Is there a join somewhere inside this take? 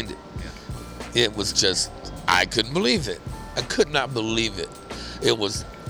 no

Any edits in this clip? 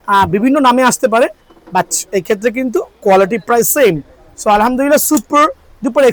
no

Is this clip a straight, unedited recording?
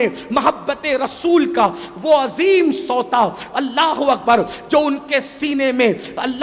yes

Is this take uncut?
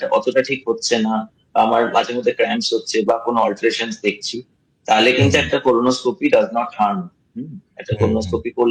yes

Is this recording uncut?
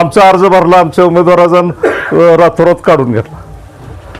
yes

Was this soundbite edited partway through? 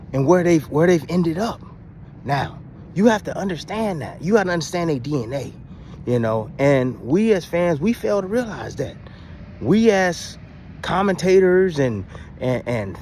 no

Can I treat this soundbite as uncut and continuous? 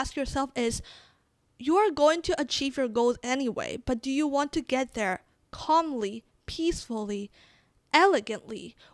yes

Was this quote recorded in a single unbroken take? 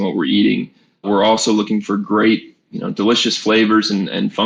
yes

